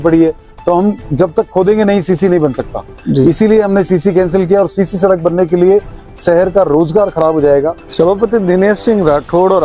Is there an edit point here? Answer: yes; 1 cut; at 7.8 s

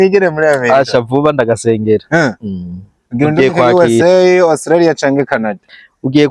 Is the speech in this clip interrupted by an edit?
no; 0 cuts

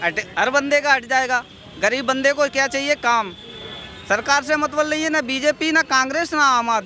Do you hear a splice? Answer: no; 0 cuts

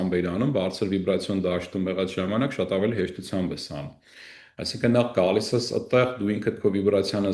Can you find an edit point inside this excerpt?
no; 0 cuts

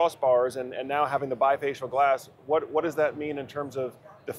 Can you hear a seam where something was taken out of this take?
no; 0 cuts

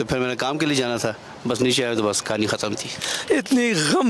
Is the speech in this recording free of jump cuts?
no; 1 cut; at 3.0 s

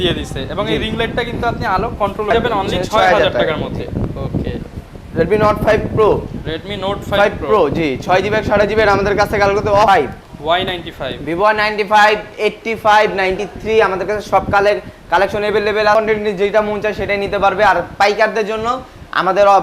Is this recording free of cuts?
no; 3 cuts; at 2.3 s, 9.9 s, 15.9 s

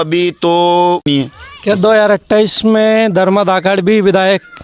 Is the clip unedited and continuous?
no; 1 cut; at 1.1 s

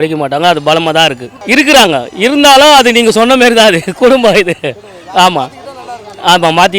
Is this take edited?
yes; 1 cut; at 1.3 s

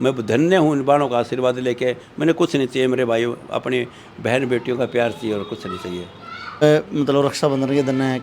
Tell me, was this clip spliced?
yes; 1 cut; at 6.6 s

